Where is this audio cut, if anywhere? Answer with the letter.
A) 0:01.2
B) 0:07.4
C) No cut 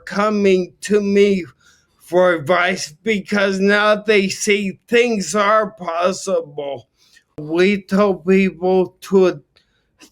B